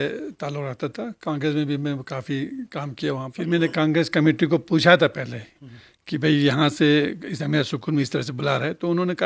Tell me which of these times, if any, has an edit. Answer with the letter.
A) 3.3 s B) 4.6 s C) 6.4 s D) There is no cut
A